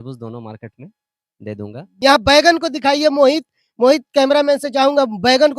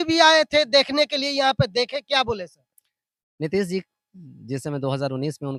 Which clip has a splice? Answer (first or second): first